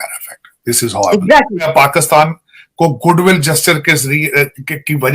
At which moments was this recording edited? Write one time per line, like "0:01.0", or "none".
0:01.7